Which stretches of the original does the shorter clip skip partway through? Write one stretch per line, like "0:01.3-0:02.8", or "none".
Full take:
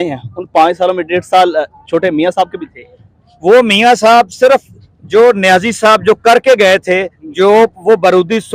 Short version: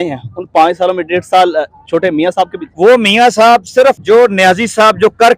0:02.6-0:03.3
0:04.7-0:05.1